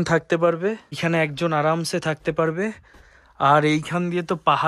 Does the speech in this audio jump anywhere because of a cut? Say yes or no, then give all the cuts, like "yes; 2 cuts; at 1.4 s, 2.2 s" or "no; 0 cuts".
yes; 1 cut; at 1.0 s